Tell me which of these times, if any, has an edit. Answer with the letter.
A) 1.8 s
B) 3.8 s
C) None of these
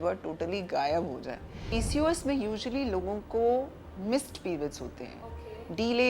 A